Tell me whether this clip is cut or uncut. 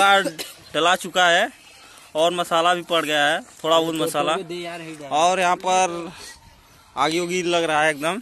uncut